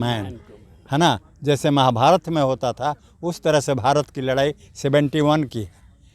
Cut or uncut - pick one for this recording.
uncut